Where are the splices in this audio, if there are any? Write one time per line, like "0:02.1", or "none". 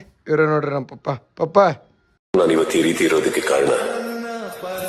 none